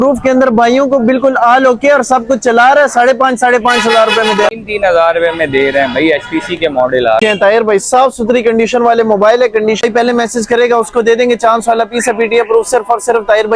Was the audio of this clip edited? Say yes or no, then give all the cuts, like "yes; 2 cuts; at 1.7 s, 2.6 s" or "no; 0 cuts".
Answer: yes; 3 cuts; at 4.5 s, 7.2 s, 9.8 s